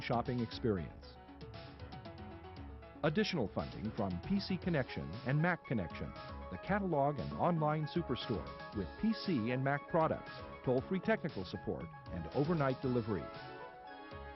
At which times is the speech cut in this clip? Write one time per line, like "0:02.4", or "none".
0:01.2
0:03.0